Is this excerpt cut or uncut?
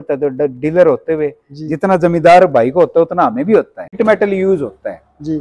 cut